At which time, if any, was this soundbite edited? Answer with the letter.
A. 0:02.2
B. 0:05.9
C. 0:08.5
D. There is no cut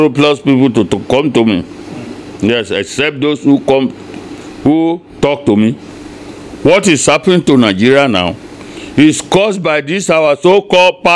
B